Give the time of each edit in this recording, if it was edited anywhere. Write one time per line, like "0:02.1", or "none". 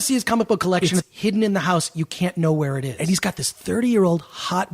0:01.0
0:02.9